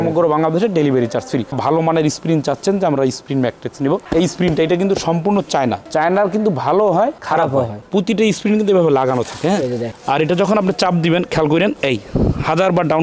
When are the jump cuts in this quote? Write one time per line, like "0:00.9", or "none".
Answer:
0:01.5
0:07.8
0:09.9